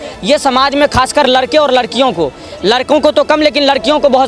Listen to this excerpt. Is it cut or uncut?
uncut